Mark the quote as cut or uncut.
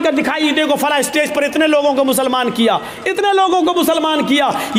uncut